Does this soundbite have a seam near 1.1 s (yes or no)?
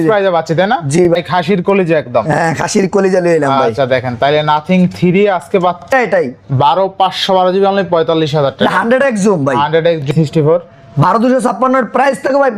yes